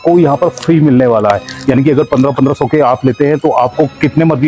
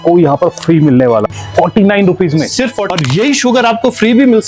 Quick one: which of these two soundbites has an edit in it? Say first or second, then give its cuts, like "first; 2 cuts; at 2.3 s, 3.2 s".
second; 2 cuts; at 1.2 s, 2.8 s